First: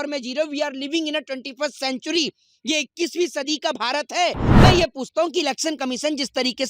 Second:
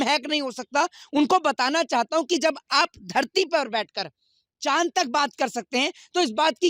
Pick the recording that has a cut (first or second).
first